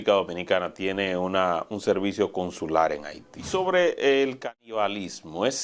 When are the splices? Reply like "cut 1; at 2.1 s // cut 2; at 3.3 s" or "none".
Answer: cut 1; at 3.4 s